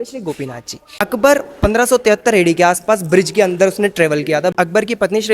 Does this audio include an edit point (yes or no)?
yes